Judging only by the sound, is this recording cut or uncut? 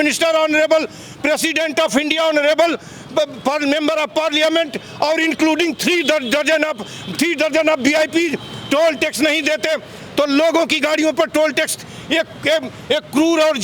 uncut